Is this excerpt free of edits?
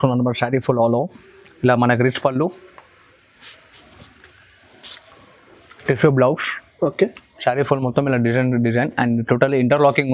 yes; 0 cuts

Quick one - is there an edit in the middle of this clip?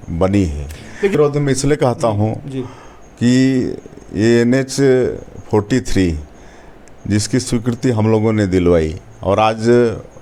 no; 0 cuts

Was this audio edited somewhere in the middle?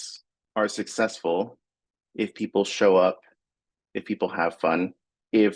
no; 0 cuts

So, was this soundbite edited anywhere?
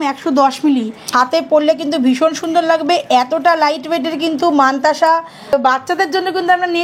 yes; 2 cuts; at 1.0 s, 5.5 s

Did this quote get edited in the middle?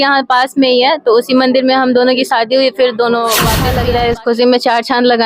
yes; 1 cut; at 3.7 s

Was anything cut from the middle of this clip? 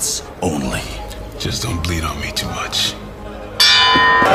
no; 0 cuts

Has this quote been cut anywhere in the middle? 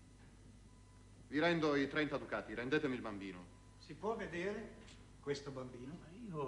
yes; 1 cut; at 4.2 s

